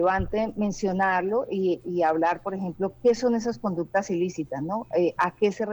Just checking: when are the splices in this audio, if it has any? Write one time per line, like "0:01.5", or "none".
none